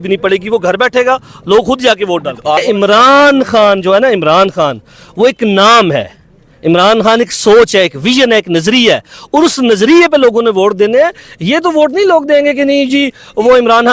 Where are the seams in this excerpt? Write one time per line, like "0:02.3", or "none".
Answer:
0:02.6